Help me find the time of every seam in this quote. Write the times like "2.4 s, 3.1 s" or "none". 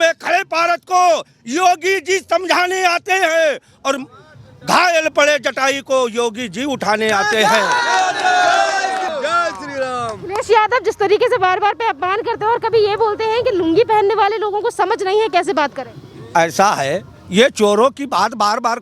9.1 s